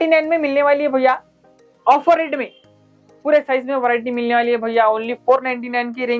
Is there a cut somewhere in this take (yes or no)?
yes